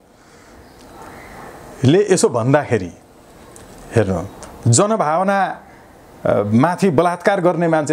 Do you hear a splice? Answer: no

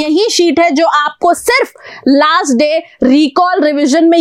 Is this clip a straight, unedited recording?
yes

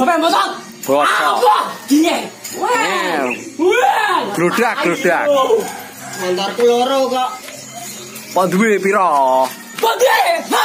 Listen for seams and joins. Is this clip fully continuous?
yes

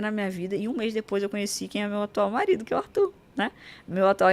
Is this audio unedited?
yes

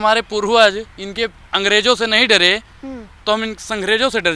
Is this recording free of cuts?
no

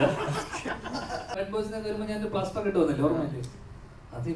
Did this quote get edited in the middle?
yes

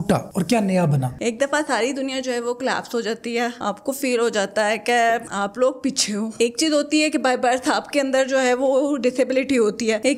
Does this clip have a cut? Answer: no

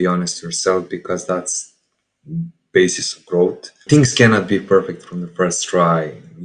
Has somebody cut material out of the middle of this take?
no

